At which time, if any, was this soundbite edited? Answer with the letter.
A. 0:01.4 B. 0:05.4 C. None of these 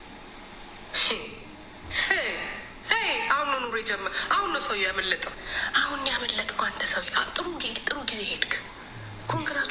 B